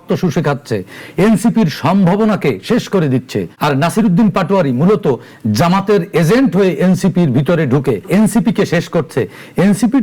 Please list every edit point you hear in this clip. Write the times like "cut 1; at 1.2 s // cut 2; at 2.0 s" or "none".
cut 1; at 3.5 s // cut 2; at 8.0 s